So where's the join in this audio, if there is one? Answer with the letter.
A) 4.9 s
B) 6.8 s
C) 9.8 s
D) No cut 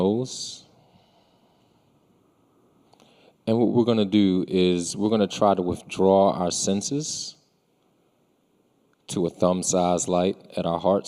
A